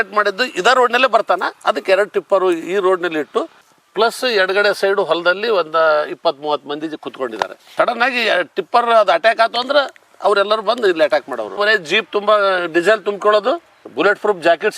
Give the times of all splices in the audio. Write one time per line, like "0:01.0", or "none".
0:03.5
0:11.5